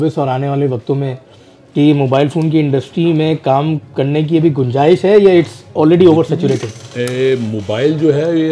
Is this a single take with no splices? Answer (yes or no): yes